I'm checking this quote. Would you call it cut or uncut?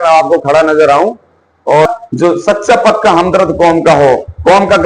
cut